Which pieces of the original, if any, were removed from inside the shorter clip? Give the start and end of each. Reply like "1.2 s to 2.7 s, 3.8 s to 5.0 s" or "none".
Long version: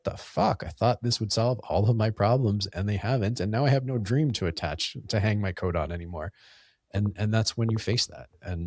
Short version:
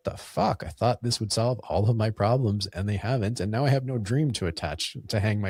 none